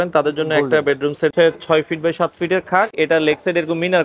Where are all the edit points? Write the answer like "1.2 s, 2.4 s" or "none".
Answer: 1.3 s, 2.9 s